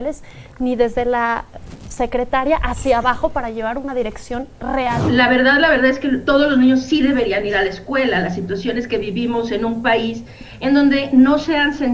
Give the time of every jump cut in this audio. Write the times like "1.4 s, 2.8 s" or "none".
5.0 s